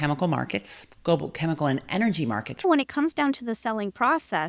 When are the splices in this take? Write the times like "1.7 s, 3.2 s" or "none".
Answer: 2.6 s